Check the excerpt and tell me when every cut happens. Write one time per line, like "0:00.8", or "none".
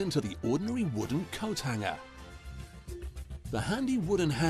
none